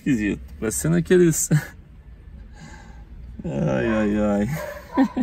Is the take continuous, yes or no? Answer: yes